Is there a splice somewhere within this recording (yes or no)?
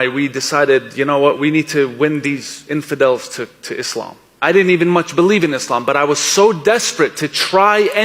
no